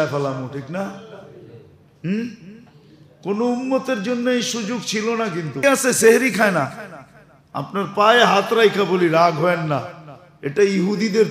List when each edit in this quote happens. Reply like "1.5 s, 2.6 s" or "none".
5.6 s